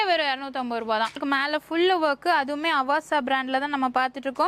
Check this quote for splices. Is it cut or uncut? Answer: cut